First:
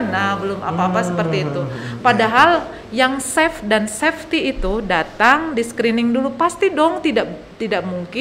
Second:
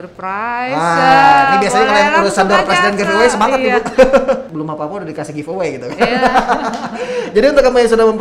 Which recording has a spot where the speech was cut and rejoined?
second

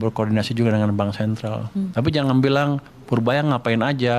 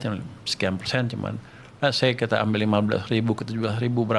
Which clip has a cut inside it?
first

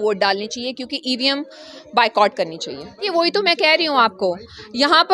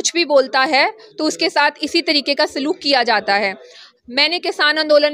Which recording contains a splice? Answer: first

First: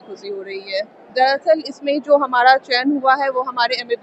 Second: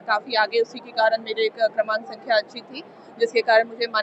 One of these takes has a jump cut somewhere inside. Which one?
first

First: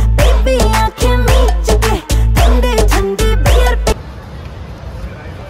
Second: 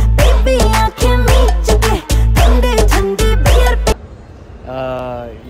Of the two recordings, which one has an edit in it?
first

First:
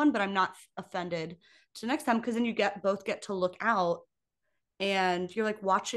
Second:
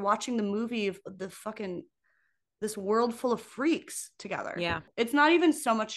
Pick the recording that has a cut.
second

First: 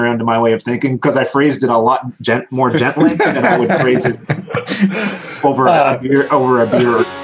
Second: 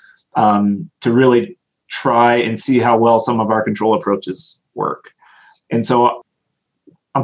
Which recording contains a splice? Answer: second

